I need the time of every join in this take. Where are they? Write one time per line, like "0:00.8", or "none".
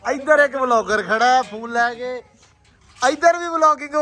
none